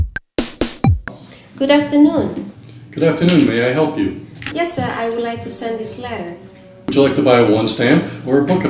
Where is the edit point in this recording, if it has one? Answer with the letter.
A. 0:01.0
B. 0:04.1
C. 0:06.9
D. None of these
A